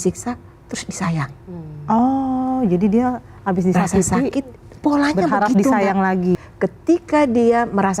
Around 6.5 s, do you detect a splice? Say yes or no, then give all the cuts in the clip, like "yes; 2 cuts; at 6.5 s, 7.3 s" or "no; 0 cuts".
yes; 1 cut; at 6.5 s